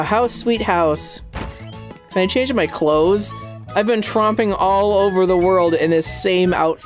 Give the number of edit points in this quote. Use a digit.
1